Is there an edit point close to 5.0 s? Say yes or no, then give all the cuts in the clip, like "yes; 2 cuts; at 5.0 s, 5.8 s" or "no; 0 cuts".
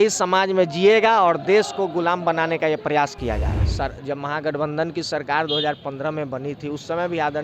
no; 1 cut; at 3.6 s